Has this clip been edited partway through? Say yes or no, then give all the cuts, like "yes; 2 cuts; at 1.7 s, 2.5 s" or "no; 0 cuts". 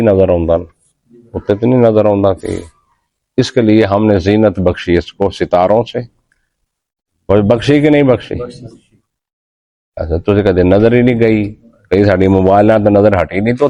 no; 0 cuts